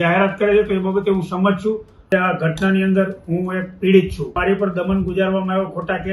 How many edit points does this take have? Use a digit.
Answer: 2